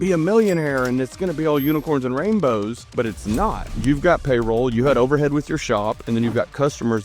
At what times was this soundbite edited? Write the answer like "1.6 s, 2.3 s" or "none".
2.8 s, 3.7 s

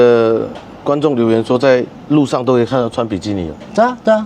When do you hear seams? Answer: none

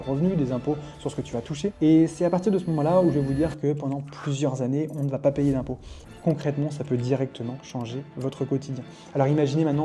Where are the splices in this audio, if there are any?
1.7 s, 5.9 s

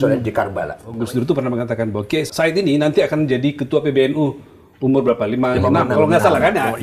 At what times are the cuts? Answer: 0.8 s, 2.3 s

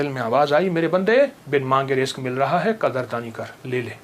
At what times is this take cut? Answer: 1.4 s

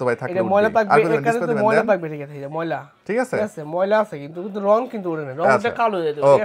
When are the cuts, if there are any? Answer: none

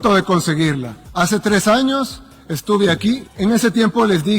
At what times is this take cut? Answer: 1.0 s, 3.3 s

